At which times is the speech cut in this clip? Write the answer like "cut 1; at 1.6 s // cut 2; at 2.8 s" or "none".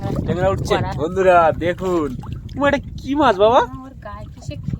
cut 1; at 0.9 s